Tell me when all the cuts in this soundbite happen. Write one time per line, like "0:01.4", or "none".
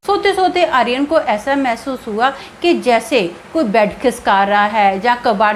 none